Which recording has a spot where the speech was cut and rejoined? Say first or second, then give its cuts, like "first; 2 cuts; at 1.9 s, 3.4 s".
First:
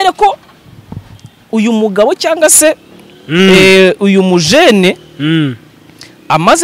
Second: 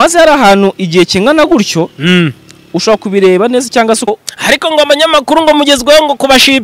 second; 1 cut; at 4.1 s